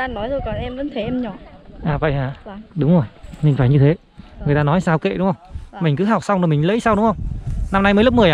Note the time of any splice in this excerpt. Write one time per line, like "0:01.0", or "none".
none